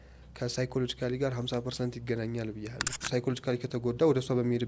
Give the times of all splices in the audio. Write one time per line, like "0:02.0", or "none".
0:02.9